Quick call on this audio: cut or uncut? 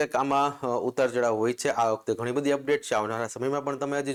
uncut